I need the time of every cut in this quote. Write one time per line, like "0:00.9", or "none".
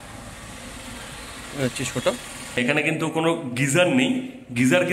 0:02.6